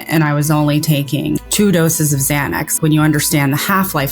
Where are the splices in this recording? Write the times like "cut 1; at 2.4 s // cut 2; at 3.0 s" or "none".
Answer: cut 1; at 1.4 s // cut 2; at 2.7 s